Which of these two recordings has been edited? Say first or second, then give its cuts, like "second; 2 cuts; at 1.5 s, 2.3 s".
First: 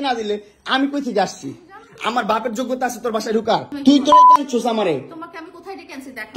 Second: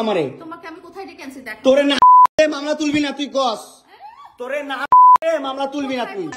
first; 1 cut; at 3.7 s